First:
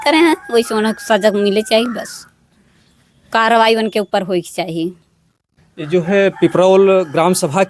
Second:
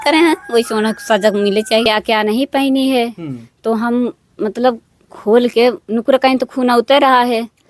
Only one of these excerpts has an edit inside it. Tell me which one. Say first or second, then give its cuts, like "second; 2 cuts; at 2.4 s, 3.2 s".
second; 1 cut; at 1.9 s